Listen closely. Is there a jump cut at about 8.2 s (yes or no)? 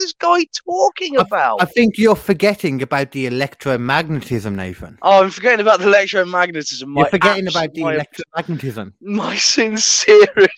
no